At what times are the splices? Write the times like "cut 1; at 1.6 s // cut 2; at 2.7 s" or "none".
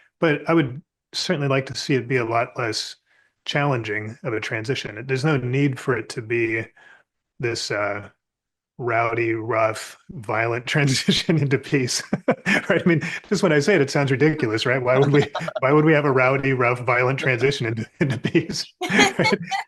none